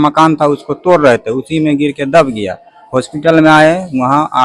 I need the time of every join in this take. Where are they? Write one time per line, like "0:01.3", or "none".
none